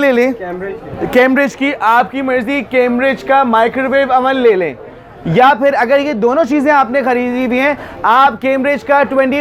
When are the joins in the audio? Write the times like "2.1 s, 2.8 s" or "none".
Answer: none